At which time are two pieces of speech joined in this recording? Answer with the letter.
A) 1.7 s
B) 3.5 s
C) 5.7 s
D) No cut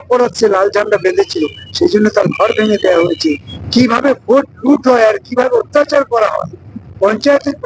B